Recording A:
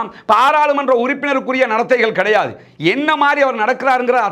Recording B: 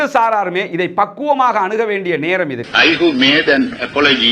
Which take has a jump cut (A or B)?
B